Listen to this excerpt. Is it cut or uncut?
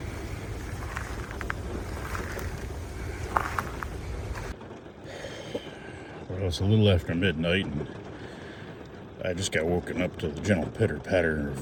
uncut